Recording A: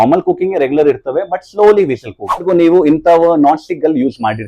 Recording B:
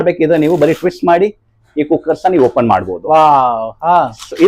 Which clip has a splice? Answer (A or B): A